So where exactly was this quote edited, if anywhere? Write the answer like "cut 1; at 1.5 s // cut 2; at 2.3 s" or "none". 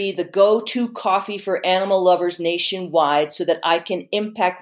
none